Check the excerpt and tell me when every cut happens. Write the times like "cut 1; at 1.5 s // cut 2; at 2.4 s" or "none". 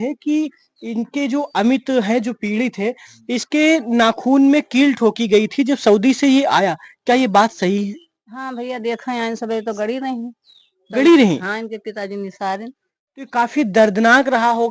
none